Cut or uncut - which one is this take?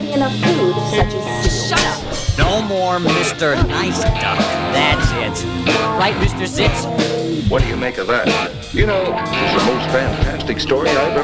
uncut